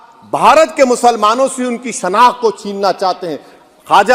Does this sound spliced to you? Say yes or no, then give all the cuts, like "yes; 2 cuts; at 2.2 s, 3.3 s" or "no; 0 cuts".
no; 0 cuts